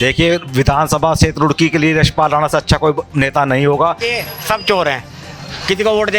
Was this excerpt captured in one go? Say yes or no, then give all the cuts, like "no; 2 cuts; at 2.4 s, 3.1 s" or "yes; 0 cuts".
no; 1 cut; at 4.0 s